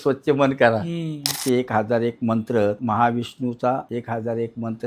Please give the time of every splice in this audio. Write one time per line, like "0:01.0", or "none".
0:01.2
0:02.8
0:03.9